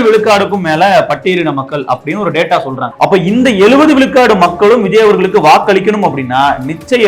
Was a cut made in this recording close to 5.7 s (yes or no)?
no